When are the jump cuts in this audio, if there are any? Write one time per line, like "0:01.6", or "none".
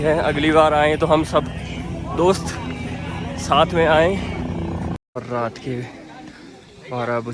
0:05.2